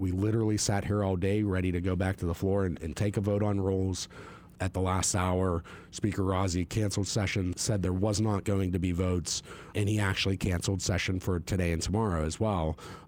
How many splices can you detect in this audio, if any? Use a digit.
3